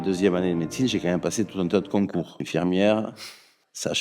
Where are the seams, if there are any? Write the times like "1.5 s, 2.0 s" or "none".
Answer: 2.5 s